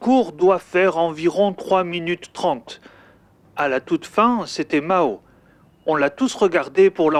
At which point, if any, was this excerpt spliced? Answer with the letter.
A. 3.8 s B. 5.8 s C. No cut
C